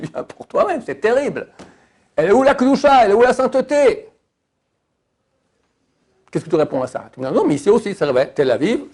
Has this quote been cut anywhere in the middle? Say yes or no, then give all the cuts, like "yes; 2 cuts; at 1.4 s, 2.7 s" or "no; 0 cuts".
no; 0 cuts